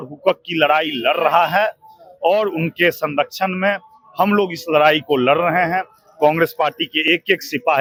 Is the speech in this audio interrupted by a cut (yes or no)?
no